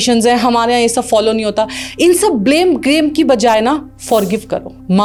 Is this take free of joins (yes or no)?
yes